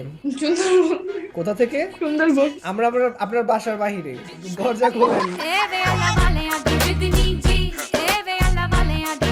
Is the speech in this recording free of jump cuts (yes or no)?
yes